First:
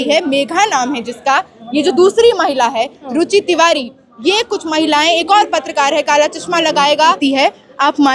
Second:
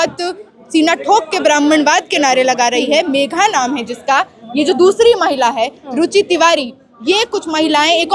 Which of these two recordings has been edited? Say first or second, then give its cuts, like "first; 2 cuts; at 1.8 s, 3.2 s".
first; 1 cut; at 7.2 s